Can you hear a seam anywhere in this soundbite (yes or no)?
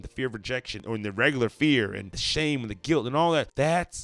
no